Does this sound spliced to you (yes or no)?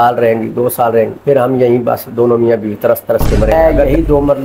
yes